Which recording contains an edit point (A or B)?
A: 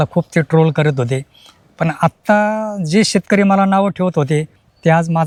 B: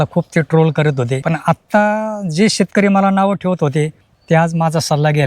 B